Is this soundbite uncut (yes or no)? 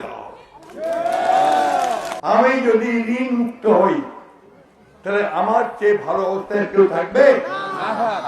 no